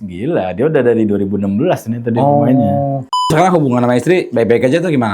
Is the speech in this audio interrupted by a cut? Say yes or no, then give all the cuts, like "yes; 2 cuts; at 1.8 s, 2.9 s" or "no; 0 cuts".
yes; 1 cut; at 3.3 s